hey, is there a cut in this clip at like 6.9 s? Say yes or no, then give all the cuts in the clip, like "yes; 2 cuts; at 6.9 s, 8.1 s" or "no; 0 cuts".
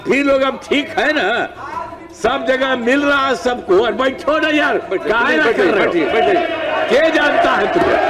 no; 0 cuts